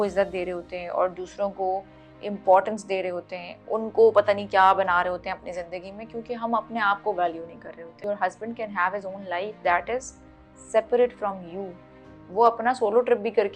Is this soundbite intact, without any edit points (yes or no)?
no